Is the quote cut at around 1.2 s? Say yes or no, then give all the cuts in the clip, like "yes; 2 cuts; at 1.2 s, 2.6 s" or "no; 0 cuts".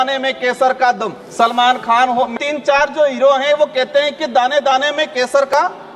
yes; 2 cuts; at 1.2 s, 2.3 s